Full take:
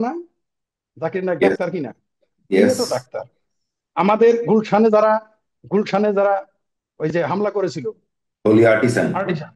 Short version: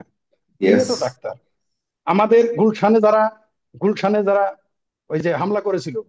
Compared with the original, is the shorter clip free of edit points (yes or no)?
yes